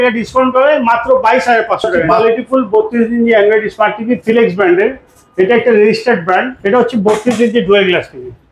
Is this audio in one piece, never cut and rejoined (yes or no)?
no